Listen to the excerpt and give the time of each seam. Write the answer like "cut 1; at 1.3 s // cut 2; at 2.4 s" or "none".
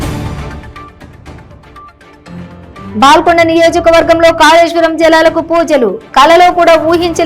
cut 1; at 2.9 s